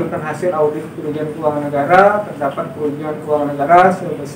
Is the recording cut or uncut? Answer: uncut